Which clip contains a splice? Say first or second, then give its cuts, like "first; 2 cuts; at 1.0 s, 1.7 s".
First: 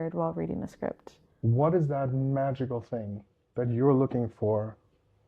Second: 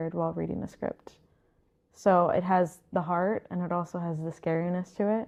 first; 1 cut; at 1.3 s